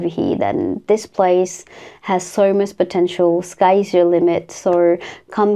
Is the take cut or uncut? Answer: uncut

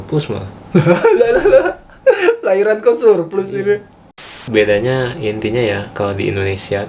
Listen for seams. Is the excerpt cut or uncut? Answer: cut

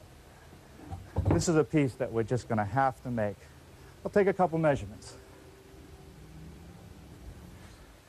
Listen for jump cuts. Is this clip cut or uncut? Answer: uncut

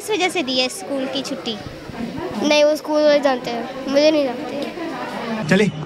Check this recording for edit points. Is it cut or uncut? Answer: uncut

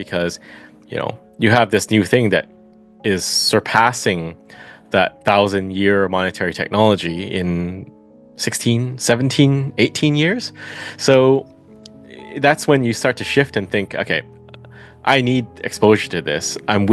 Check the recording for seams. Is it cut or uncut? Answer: uncut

